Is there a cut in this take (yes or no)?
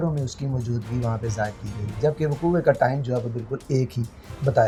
no